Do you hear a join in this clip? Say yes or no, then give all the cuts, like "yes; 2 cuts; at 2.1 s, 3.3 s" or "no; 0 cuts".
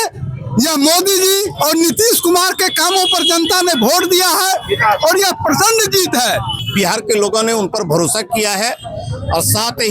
yes; 1 cut; at 6.6 s